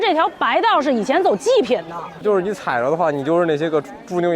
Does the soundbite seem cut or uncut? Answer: cut